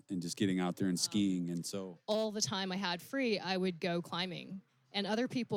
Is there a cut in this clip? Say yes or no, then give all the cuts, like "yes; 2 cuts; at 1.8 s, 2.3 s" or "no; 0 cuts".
yes; 1 cut; at 1.7 s